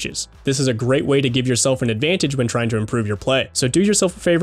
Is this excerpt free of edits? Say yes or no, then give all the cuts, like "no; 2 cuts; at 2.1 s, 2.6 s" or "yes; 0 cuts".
no; 1 cut; at 3.5 s